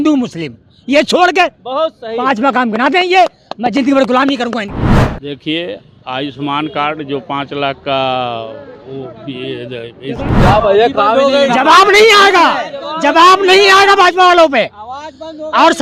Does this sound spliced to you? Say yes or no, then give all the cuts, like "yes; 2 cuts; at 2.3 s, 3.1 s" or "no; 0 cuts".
yes; 1 cut; at 10.3 s